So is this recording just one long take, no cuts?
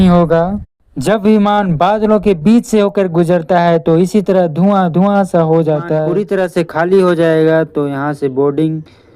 no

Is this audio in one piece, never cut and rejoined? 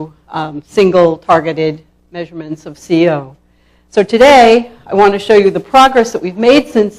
no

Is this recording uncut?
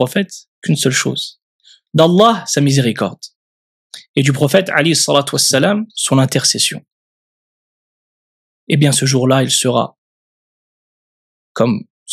yes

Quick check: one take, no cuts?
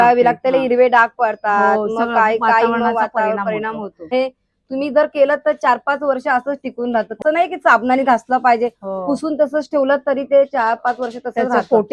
no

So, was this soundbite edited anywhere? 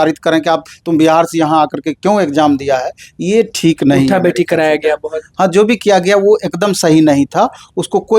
no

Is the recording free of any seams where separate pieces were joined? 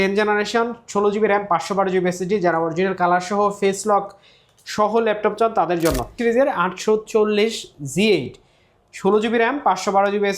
no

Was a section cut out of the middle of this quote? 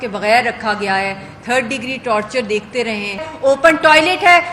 yes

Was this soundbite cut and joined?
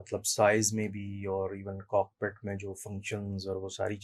no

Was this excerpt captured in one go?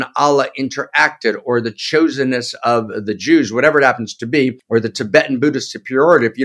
no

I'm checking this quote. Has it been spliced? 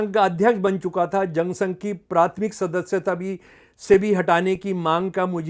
no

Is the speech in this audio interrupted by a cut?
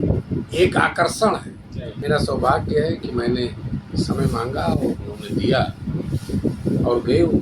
yes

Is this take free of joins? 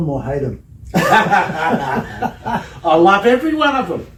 yes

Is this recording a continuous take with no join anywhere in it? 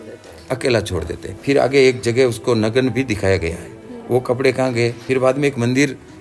no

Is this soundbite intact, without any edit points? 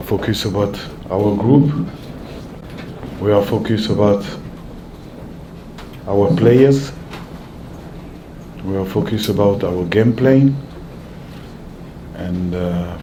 yes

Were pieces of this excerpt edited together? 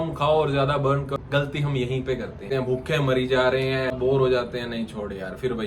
yes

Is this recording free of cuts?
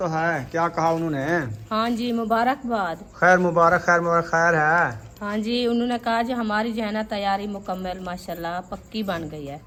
yes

